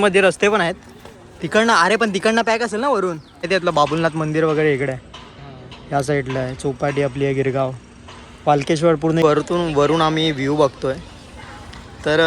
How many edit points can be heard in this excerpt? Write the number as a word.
two